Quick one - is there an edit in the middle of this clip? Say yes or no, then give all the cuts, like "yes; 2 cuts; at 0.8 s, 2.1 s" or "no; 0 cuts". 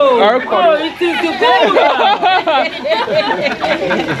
no; 0 cuts